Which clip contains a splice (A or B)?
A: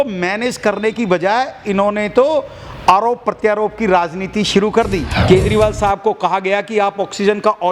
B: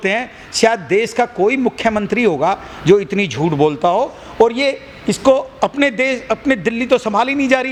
A